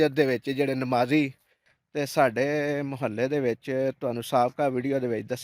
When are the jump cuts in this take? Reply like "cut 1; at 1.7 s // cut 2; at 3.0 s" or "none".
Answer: cut 1; at 1.9 s